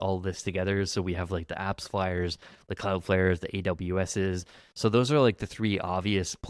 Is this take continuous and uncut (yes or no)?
yes